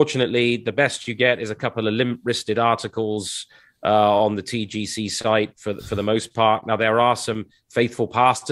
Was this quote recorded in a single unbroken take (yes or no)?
yes